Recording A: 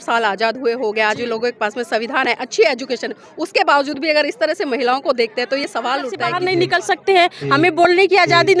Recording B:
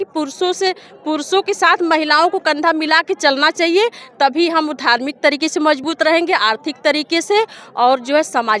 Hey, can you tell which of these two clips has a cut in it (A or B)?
A